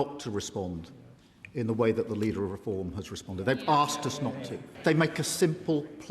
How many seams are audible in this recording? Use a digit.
1